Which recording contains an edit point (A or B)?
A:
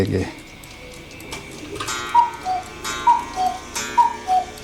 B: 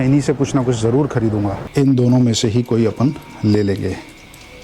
B